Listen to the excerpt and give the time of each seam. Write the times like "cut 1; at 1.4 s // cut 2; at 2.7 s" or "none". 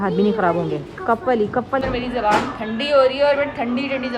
cut 1; at 1.8 s